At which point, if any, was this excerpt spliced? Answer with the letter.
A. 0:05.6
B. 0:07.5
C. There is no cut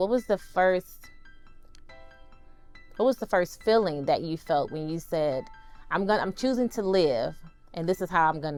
C